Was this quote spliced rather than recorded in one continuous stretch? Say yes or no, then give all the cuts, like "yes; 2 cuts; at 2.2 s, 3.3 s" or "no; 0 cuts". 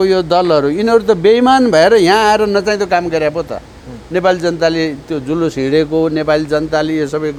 no; 0 cuts